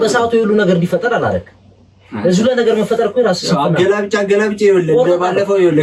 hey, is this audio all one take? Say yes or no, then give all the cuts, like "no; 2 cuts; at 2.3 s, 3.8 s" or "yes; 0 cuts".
yes; 0 cuts